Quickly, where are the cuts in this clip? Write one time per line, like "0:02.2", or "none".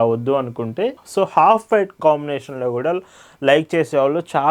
0:01.0

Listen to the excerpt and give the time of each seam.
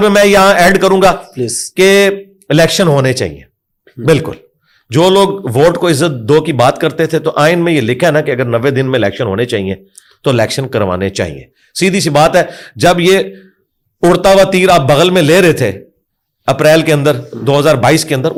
none

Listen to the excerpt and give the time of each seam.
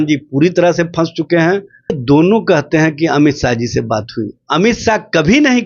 0:02.0

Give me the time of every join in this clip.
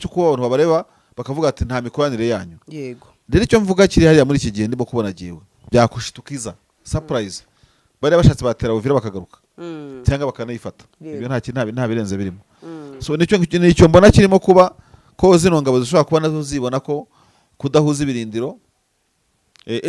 0:05.7

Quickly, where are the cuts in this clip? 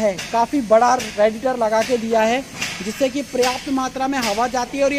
none

